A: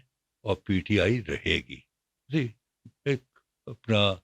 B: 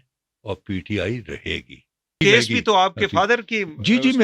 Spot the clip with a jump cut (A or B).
B